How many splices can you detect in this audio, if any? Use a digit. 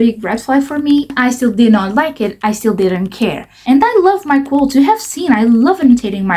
2